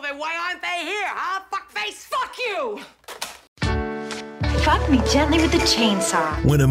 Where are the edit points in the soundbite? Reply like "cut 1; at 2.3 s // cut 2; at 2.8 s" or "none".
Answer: cut 1; at 3.4 s